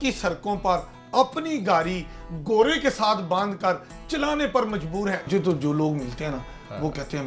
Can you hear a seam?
yes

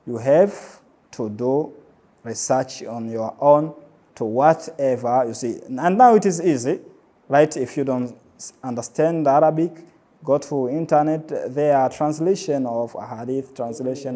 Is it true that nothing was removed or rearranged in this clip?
yes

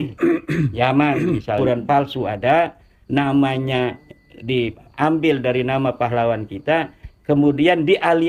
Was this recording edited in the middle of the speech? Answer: yes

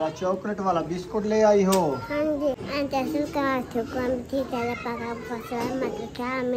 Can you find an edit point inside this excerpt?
yes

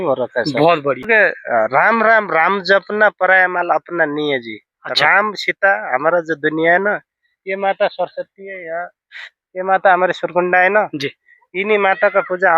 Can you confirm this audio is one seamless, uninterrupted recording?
no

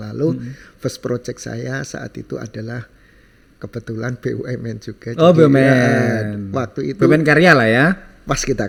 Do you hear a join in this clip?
no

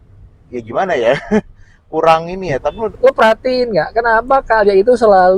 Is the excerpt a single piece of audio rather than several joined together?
no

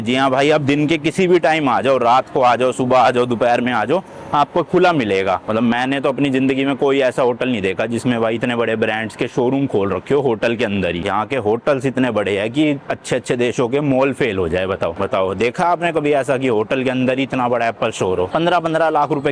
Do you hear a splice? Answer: yes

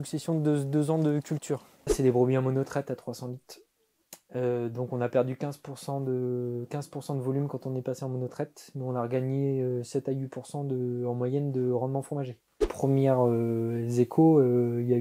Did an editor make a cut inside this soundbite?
yes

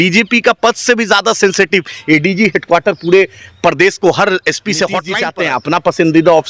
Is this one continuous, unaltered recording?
no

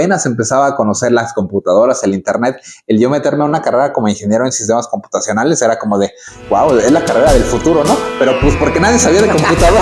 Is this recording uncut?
yes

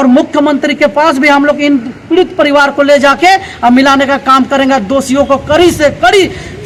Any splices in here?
no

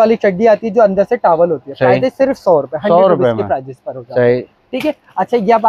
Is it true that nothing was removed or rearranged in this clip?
yes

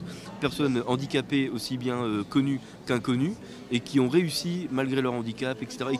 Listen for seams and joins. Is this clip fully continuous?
no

